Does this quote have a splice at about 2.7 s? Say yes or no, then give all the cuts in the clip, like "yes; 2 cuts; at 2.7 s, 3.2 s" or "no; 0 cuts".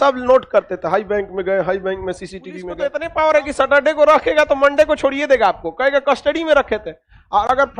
yes; 1 cut; at 2.7 s